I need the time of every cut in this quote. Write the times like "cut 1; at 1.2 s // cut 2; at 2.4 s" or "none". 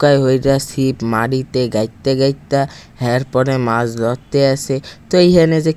none